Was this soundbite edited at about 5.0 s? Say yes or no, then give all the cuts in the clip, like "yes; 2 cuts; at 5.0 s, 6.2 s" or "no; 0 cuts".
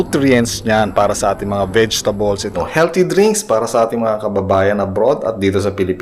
no; 1 cut; at 2.5 s